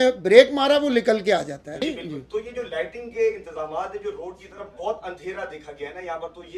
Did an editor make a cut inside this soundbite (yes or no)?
yes